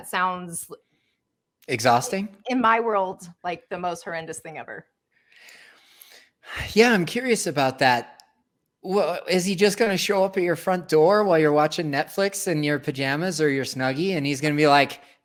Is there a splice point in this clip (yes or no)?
no